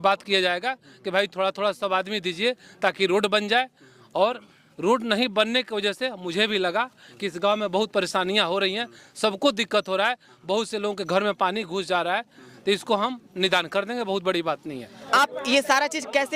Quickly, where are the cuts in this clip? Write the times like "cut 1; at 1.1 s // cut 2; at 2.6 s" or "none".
cut 1; at 15.0 s